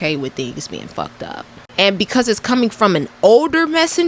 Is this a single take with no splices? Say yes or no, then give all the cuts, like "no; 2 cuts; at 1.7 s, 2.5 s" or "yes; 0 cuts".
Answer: no; 1 cut; at 1.0 s